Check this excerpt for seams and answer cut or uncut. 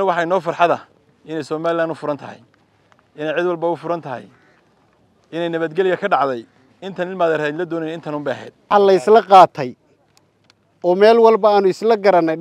cut